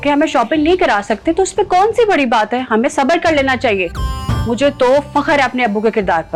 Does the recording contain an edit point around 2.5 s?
no; 0 cuts

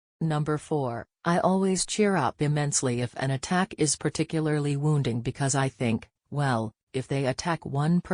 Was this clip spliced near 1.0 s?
yes; 1 cut; at 1.0 s

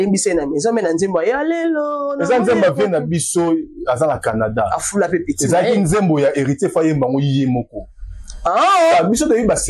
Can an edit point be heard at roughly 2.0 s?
no; 0 cuts

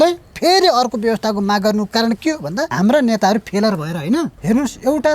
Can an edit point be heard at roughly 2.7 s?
yes; 2 cuts; at 2.7 s, 4.4 s

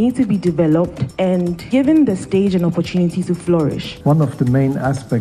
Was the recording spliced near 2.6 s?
no; 2 cuts; at 1.3 s, 3.9 s

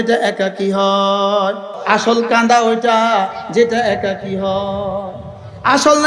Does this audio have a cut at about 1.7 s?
yes; 1 cut; at 1.7 s

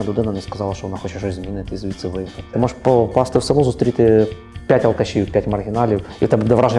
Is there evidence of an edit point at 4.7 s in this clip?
no; 1 cut; at 2.5 s

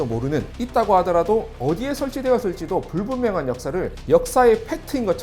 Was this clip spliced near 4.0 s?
yes; 1 cut; at 4.0 s

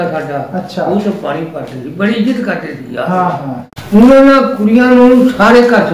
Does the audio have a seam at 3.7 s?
yes; 1 cut; at 3.7 s

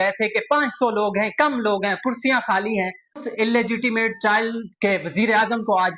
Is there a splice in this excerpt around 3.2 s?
yes; 1 cut; at 3.2 s

